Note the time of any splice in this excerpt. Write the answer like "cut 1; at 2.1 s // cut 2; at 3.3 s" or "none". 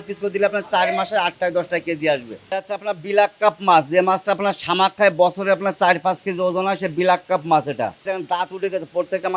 cut 1; at 2.6 s // cut 2; at 8.1 s